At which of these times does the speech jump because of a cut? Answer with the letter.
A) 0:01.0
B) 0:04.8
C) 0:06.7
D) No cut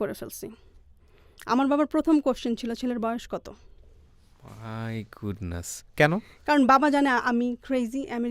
D